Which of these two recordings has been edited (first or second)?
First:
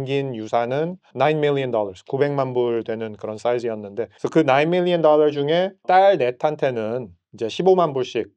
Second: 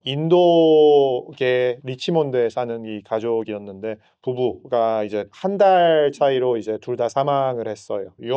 first